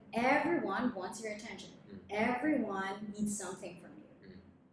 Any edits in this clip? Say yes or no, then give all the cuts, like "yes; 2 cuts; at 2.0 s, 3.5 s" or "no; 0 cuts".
no; 0 cuts